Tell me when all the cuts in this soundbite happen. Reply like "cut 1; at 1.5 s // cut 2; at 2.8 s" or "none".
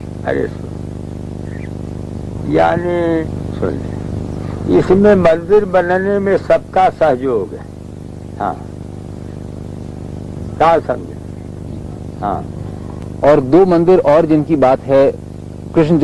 cut 1; at 3.2 s